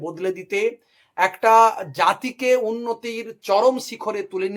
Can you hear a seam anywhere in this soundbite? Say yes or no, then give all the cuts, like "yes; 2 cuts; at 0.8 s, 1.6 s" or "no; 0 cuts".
no; 0 cuts